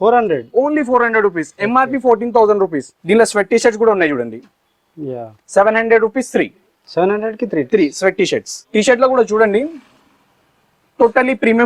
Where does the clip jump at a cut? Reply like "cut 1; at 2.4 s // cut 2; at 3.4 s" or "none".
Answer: cut 1; at 2.9 s // cut 2; at 8.6 s